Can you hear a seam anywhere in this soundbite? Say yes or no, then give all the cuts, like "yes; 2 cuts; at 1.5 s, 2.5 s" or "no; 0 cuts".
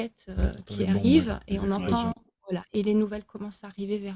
yes; 1 cut; at 2.7 s